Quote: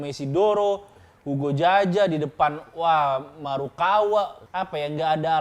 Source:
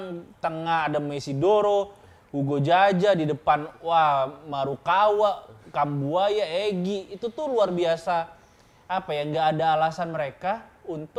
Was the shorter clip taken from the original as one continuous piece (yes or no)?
no